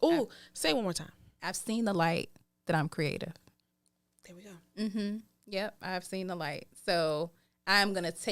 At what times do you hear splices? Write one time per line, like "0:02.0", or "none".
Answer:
none